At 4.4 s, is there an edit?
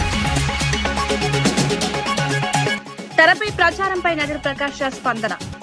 no; 2 cuts; at 0.9 s, 2.3 s

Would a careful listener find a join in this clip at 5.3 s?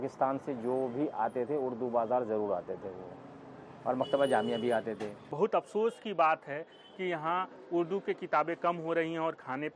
yes; 1 cut; at 5.3 s

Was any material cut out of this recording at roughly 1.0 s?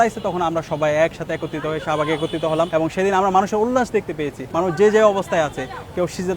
no; 2 cuts; at 2.7 s, 4.3 s

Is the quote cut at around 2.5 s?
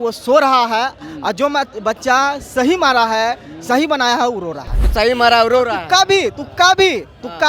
no; 1 cut; at 4.8 s

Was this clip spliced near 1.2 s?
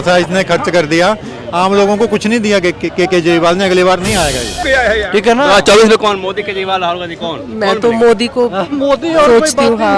no; 1 cut; at 4.5 s

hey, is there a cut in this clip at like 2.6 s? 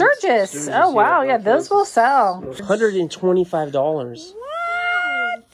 yes; 1 cut; at 2.6 s

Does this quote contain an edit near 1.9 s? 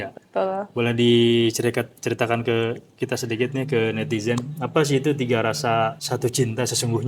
no; 1 cut; at 6.0 s

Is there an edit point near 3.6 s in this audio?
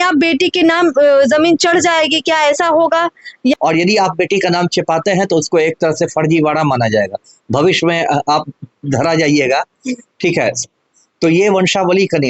yes; 1 cut; at 3.6 s

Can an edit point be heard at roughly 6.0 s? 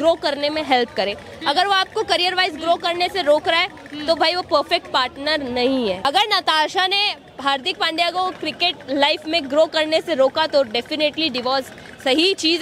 yes; 1 cut; at 6.0 s

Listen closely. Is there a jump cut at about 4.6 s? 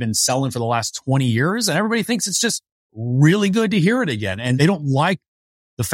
yes; 1 cut; at 4.6 s

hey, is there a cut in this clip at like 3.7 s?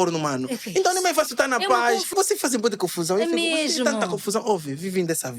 no; 1 cut; at 2.1 s

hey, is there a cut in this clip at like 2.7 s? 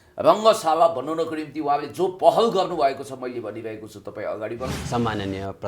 no; 1 cut; at 4.8 s

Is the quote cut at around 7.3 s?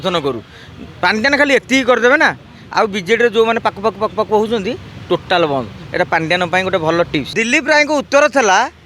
yes; 1 cut; at 7.3 s

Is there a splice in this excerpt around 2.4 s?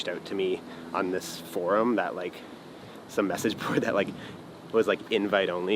no; 0 cuts

